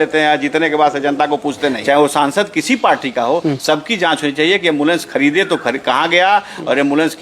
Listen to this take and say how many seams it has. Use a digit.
1